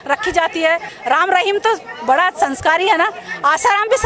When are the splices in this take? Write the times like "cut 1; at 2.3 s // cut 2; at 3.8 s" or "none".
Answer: cut 1; at 0.9 s